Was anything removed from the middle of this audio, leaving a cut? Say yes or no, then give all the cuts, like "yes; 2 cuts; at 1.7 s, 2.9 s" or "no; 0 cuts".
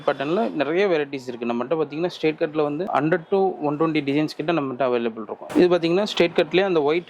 yes; 1 cut; at 5.4 s